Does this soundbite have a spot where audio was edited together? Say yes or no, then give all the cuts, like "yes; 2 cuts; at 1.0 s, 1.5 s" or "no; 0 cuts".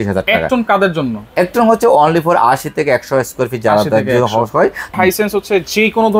yes; 1 cut; at 4.9 s